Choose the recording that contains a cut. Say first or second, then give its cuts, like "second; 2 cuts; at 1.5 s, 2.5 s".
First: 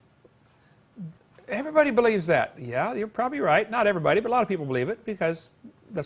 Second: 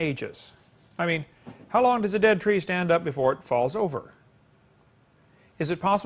second; 1 cut; at 3.1 s